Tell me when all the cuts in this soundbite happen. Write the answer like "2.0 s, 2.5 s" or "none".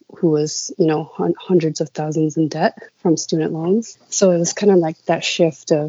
none